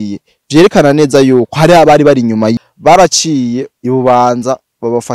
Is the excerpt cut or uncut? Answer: cut